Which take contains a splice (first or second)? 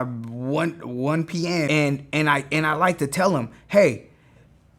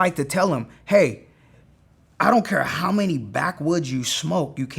first